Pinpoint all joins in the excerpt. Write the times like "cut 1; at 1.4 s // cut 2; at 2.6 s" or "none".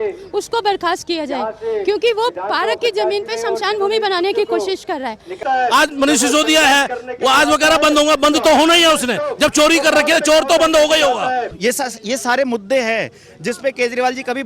cut 1; at 5.4 s // cut 2; at 11.5 s